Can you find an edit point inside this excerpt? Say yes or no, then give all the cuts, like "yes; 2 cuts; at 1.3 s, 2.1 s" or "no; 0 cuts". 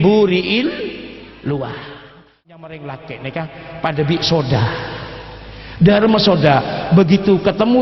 yes; 1 cut; at 2.5 s